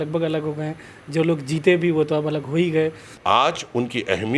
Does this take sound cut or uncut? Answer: cut